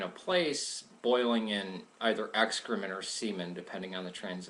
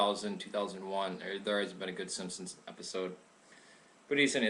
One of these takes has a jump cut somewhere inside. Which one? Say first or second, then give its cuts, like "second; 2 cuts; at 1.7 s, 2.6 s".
second; 1 cut; at 3.3 s